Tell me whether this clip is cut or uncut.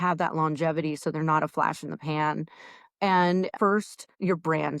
cut